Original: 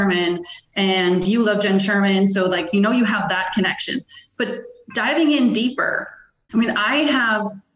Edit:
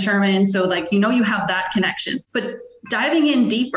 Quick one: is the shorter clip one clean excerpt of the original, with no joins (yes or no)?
no